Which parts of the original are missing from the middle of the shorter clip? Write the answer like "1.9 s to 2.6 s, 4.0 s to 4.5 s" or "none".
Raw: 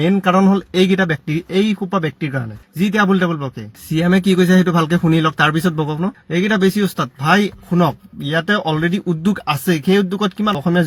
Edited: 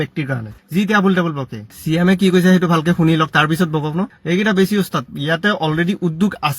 7.1 s to 8.1 s